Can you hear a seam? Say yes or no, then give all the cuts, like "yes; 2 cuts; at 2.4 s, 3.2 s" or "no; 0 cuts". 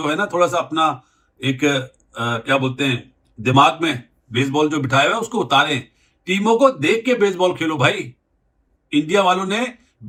no; 0 cuts